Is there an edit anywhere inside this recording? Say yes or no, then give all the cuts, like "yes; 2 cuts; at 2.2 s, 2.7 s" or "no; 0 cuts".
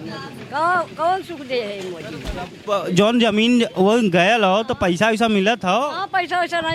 no; 0 cuts